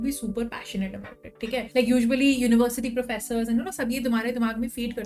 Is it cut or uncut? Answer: uncut